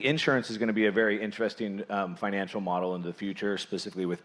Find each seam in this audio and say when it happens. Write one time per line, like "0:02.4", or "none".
none